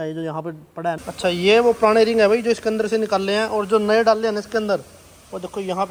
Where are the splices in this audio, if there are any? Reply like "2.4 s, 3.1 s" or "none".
1.0 s